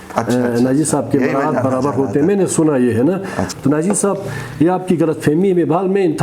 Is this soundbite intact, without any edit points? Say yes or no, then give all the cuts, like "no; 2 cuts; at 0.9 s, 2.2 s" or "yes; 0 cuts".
no; 1 cut; at 3.4 s